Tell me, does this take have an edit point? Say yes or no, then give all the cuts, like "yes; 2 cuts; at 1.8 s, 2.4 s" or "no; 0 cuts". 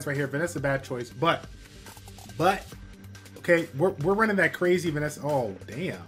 no; 0 cuts